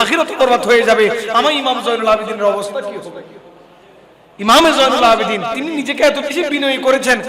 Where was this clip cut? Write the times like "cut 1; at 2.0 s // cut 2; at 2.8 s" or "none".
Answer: cut 1; at 5.6 s